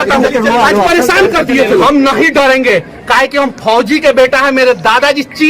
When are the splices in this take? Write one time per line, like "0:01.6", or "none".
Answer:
0:01.8